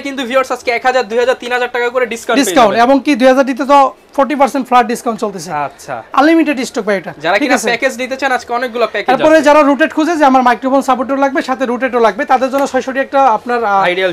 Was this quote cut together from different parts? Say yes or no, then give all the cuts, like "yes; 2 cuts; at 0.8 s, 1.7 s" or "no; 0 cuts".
no; 0 cuts